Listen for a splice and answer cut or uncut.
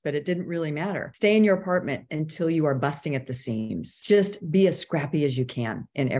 cut